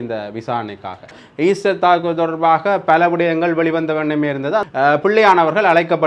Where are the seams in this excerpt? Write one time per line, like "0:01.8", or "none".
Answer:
0:01.2
0:04.7